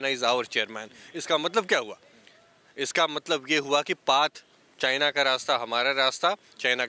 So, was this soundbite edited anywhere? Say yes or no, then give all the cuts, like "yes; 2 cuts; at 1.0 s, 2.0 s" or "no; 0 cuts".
no; 0 cuts